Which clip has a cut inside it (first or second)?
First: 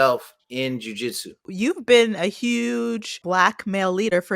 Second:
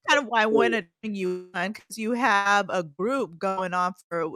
first